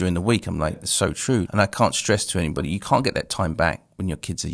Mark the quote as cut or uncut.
cut